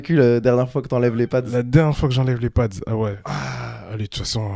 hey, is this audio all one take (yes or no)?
no